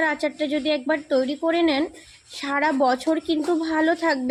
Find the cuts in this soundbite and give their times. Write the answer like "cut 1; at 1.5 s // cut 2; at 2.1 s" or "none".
none

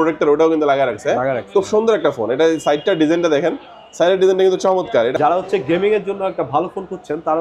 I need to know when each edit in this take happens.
cut 1; at 5.1 s

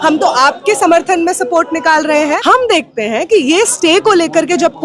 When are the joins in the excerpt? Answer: cut 1; at 2.4 s

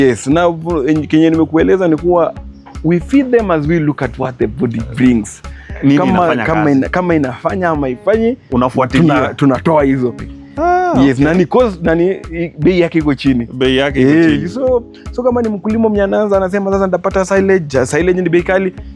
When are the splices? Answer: cut 1; at 10.4 s

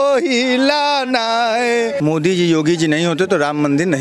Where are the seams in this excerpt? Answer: cut 1; at 2.0 s

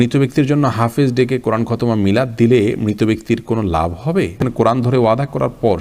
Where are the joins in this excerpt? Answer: cut 1; at 4.4 s

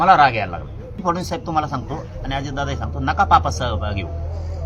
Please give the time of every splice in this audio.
cut 1; at 1.0 s

